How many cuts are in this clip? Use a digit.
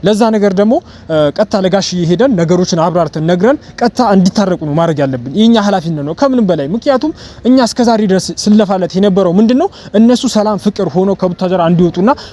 0